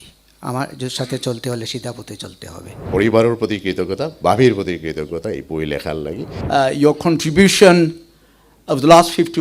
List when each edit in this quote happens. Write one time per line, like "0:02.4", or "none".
0:02.8
0:06.4